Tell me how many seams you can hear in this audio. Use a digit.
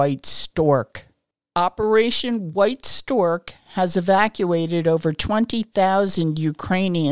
1